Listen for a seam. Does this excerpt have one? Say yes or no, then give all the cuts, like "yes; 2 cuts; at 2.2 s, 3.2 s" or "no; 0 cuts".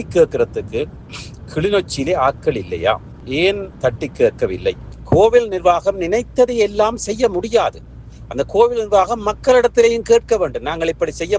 yes; 1 cut; at 4.9 s